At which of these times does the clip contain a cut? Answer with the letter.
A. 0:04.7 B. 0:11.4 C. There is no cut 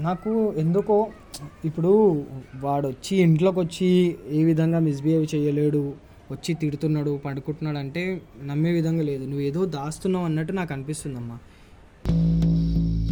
C